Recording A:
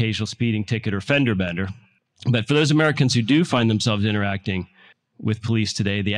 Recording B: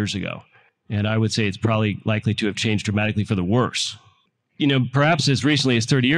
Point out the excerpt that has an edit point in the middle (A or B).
A